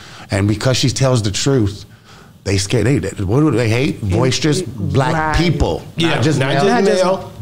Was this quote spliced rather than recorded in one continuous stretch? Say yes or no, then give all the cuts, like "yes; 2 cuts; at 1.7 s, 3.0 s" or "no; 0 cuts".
no; 0 cuts